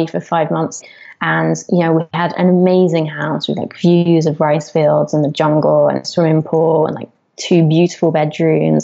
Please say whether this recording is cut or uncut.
cut